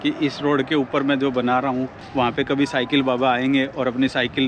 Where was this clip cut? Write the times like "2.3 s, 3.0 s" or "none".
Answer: 2.0 s